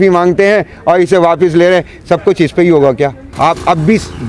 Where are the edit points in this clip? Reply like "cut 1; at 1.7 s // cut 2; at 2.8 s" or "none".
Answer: cut 1; at 3.3 s